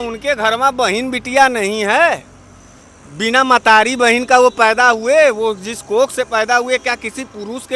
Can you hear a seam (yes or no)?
no